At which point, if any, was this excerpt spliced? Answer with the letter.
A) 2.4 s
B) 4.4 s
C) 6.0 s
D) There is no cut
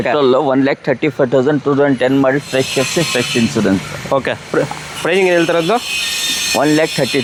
D